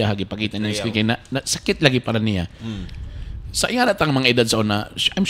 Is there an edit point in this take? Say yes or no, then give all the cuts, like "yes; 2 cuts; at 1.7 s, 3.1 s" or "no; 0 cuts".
no; 0 cuts